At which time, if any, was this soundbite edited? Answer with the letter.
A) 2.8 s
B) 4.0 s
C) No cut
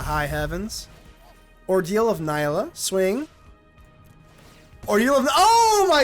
A